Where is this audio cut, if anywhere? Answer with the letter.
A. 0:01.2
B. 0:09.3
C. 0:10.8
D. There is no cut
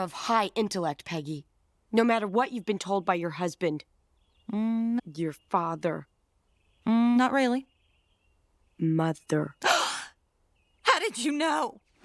D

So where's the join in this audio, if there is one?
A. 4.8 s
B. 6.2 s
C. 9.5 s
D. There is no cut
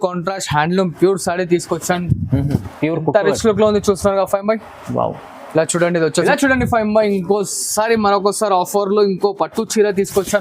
B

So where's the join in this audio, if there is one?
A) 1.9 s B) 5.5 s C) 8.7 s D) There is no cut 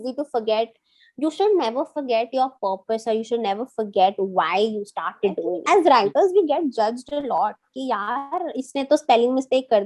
B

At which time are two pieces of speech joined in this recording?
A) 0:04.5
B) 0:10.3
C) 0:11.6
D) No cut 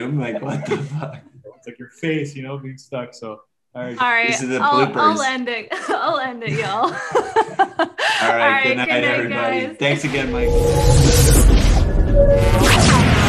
B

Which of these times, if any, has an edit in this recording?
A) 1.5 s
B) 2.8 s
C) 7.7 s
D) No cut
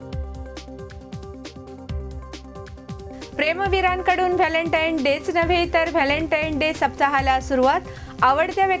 A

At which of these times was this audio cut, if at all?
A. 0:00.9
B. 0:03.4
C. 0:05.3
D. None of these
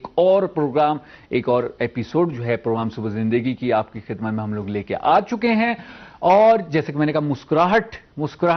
B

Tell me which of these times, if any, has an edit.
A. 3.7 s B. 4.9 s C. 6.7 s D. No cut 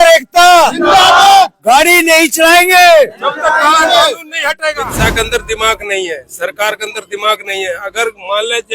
B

